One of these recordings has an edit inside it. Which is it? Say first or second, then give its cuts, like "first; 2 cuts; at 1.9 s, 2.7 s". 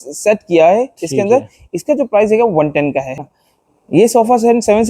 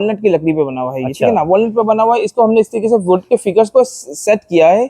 first; 1 cut; at 3.2 s